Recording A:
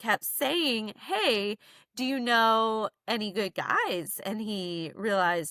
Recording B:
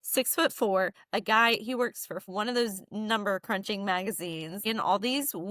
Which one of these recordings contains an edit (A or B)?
B